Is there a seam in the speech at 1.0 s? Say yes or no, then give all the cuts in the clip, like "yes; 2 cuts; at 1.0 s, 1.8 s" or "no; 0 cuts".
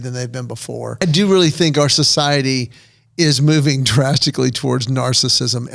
yes; 1 cut; at 1.0 s